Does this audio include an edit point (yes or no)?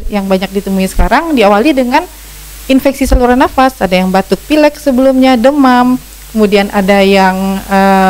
no